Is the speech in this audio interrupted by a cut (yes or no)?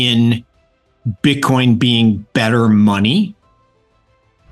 no